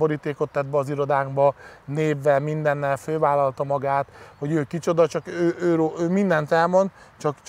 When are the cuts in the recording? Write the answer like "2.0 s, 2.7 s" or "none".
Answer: none